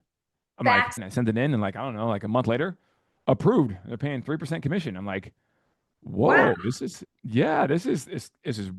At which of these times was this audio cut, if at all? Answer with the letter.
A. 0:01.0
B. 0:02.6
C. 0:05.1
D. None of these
A